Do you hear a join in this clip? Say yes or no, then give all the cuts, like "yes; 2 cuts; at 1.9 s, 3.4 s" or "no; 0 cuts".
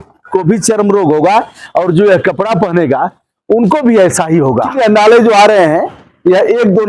yes; 1 cut; at 4.7 s